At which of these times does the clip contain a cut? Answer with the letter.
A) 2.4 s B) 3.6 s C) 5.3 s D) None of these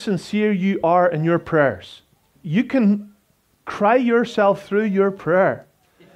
A